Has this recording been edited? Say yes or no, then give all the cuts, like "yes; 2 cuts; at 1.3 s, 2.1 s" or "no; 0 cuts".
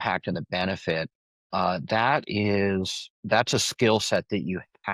no; 0 cuts